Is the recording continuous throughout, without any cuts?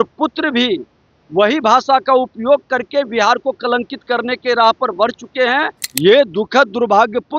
no; 1 cut; at 5.8 s

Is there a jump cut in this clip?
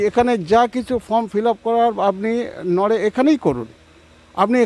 no; 0 cuts

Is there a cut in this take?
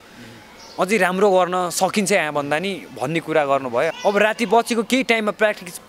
yes; 1 cut; at 3.9 s

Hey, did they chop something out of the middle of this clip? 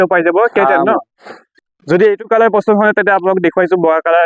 yes; 1 cut; at 1.6 s

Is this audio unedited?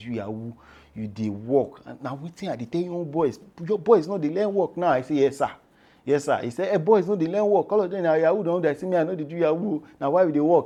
yes; 0 cuts

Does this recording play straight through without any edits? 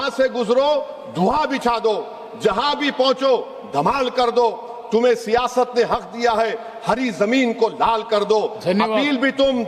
yes; 0 cuts

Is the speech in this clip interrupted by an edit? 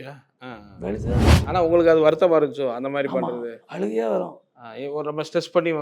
yes; 1 cut; at 1.4 s

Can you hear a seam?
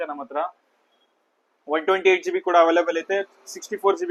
no; 0 cuts

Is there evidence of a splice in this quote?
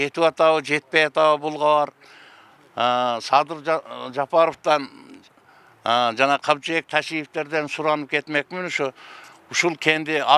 no; 0 cuts

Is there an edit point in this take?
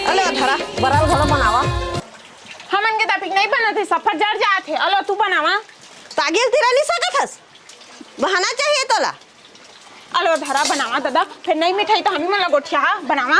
no; 0 cuts

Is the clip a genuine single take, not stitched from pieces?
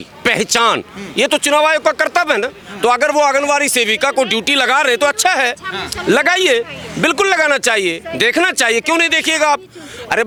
yes; 0 cuts

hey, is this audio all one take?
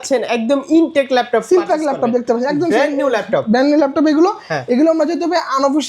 yes; 0 cuts

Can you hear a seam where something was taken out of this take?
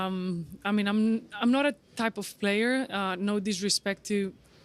no; 0 cuts

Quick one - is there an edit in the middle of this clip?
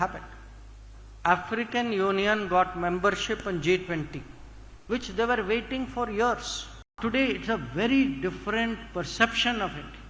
yes; 1 cut; at 7.0 s

